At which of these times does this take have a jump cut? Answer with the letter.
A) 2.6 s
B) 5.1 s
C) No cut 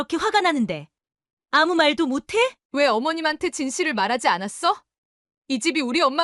A